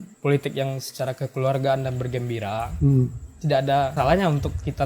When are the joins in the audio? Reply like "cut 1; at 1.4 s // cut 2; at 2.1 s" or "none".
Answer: cut 1; at 3.9 s